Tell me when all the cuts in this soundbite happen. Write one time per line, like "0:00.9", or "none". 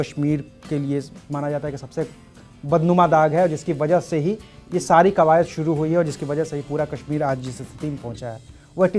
none